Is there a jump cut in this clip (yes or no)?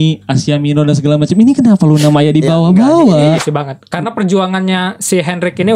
yes